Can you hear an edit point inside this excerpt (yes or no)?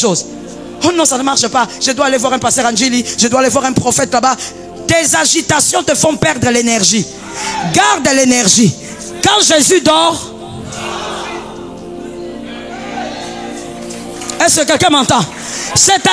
no